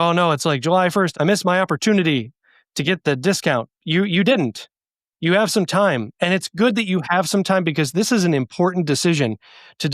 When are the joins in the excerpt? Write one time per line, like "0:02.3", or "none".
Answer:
0:01.1
0:03.8

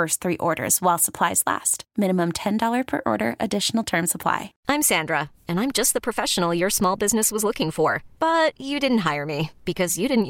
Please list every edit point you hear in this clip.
0:04.6

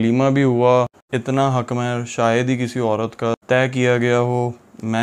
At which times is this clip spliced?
0:01.0

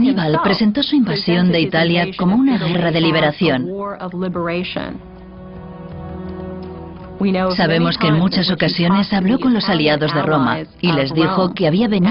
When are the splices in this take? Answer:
0:09.2

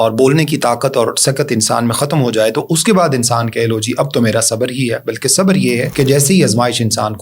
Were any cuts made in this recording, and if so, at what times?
0:05.9

